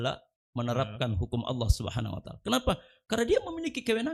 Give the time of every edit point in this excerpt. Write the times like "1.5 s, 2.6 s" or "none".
none